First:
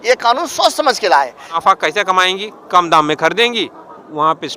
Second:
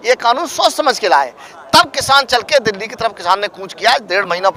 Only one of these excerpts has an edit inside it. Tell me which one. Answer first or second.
first